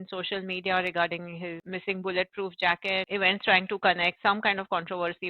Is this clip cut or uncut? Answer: cut